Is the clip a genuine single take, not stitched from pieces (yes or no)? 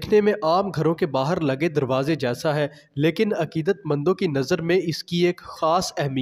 yes